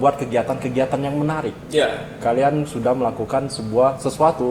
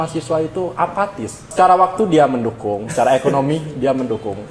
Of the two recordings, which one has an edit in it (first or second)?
second